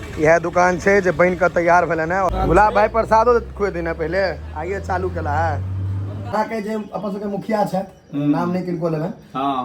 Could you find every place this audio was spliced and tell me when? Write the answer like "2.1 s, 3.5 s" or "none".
2.3 s, 6.3 s